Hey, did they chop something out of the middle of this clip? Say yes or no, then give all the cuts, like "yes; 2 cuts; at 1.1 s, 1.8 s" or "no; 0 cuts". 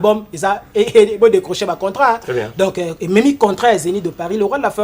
no; 0 cuts